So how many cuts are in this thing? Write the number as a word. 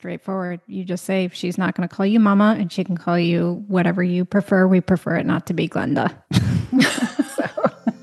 zero